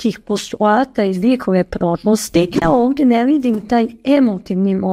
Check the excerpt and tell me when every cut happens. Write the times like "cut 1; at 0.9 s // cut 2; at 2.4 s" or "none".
cut 1; at 2.6 s